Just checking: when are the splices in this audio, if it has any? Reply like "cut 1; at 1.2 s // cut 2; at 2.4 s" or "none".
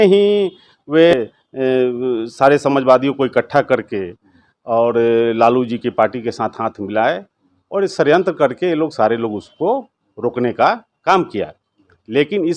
cut 1; at 1.1 s